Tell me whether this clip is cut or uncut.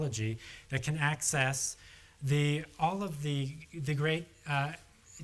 cut